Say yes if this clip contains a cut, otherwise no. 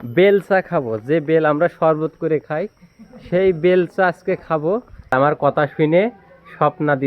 yes